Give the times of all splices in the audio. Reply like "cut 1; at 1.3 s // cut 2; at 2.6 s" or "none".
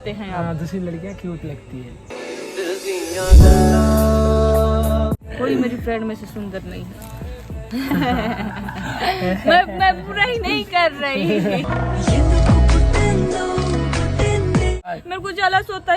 cut 1; at 5.1 s // cut 2; at 14.9 s